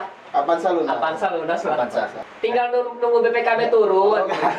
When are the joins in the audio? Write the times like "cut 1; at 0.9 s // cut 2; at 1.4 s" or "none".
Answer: cut 1; at 2.2 s